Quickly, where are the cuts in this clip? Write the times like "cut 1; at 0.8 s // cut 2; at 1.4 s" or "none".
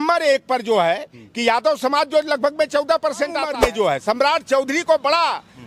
cut 1; at 3.5 s